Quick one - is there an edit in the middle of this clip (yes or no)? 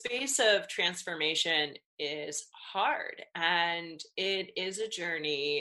no